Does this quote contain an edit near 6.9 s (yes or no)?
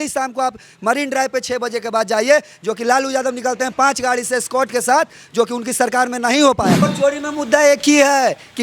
yes